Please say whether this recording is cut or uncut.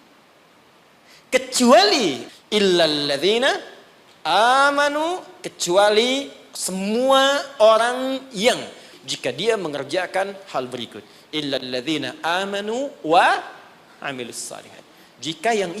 cut